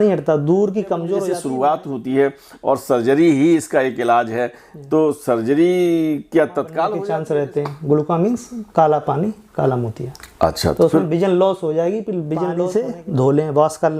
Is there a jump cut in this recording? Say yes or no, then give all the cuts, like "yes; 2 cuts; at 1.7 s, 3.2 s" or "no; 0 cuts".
yes; 3 cuts; at 1.1 s, 7.0 s, 12.7 s